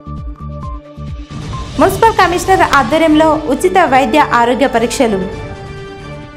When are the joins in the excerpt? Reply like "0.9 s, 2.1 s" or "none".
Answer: none